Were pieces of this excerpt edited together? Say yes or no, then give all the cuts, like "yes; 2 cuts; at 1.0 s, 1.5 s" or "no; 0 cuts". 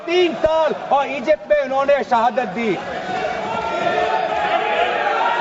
no; 0 cuts